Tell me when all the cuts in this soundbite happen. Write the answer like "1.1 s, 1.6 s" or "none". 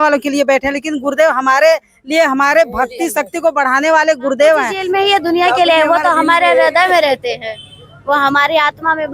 4.7 s

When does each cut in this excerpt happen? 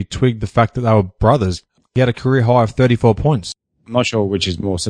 1.9 s, 3.5 s

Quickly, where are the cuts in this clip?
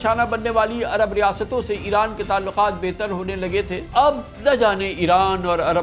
3.8 s

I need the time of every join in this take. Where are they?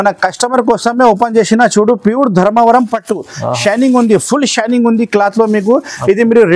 none

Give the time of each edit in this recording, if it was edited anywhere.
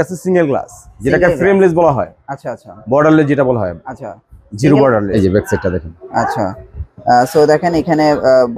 5.1 s

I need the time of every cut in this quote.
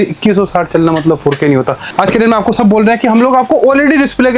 1.9 s

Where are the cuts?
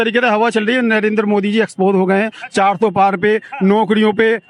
none

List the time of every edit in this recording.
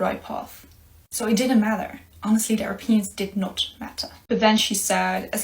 4.1 s

